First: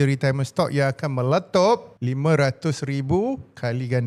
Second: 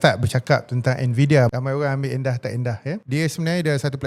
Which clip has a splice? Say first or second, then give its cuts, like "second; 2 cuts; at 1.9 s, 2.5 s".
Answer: second; 2 cuts; at 1.5 s, 3.0 s